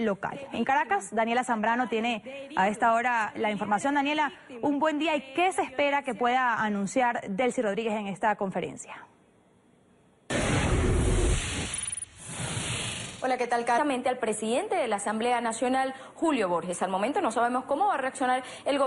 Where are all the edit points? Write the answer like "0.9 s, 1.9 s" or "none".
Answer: none